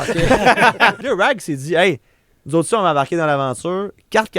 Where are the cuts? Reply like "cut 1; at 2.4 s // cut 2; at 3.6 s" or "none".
cut 1; at 1.0 s